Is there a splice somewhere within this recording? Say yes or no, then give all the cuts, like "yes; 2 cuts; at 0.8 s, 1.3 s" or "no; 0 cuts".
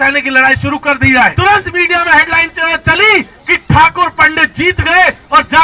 yes; 1 cut; at 1.3 s